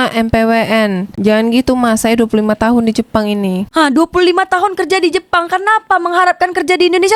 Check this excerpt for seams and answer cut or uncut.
uncut